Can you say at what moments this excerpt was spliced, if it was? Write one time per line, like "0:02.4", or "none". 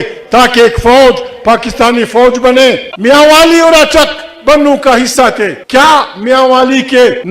0:02.9